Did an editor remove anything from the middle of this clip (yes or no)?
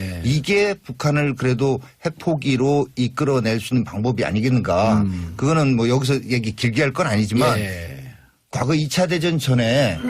no